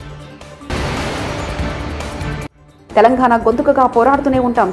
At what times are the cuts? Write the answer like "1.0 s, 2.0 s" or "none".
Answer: 0.7 s, 2.7 s